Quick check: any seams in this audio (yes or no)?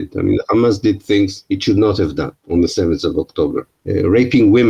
yes